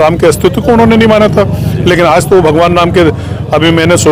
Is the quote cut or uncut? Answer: uncut